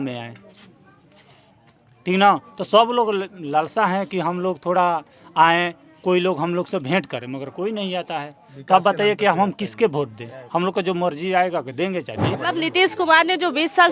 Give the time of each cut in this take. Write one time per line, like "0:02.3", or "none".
0:12.3